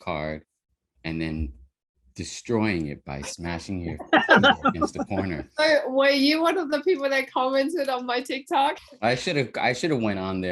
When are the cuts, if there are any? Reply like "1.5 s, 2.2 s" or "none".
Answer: 8.9 s